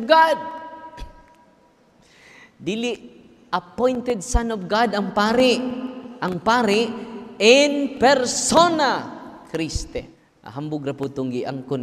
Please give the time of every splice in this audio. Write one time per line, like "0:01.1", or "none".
0:10.2